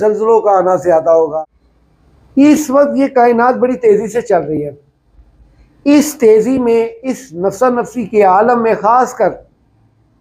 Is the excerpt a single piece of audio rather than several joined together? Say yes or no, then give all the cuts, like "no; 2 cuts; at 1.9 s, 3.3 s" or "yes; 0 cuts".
no; 1 cut; at 1.3 s